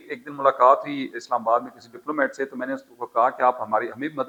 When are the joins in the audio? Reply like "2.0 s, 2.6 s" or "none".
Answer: none

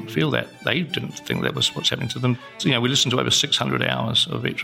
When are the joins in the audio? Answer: 1.2 s, 2.5 s

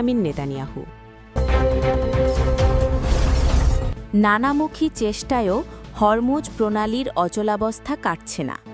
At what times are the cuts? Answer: 1.3 s, 4.1 s

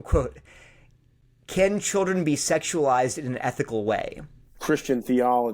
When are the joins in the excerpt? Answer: 4.5 s

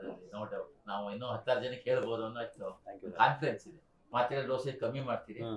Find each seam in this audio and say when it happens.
4.0 s

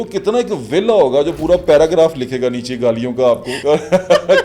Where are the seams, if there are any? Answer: 3.5 s

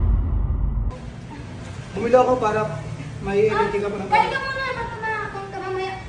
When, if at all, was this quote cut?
0.9 s

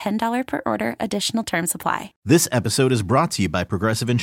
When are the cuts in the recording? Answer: 2.1 s

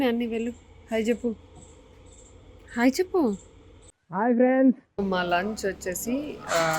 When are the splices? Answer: 4.9 s

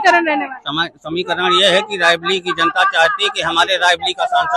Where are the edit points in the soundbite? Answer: none

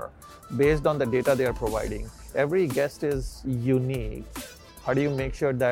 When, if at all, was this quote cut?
2.2 s

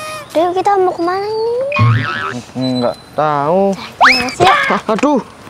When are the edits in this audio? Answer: none

